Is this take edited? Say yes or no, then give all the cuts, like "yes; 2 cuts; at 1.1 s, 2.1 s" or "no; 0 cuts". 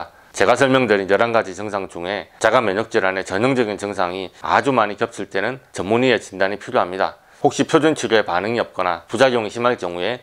yes; 1 cut; at 7.3 s